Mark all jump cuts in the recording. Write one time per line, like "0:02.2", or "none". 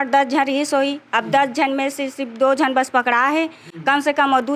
none